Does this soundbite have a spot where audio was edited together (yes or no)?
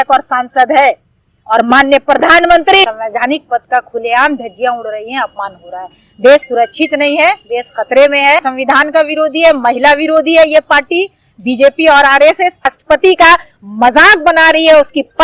yes